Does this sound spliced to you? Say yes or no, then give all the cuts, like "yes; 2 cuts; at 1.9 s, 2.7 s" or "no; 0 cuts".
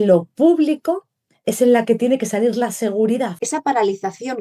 yes; 1 cut; at 3.4 s